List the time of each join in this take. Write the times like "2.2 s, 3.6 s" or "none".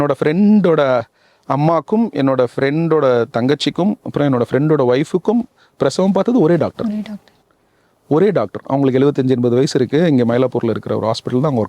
none